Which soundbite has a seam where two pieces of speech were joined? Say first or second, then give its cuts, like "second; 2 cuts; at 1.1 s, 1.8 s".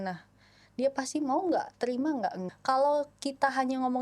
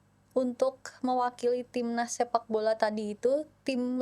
first; 1 cut; at 2.5 s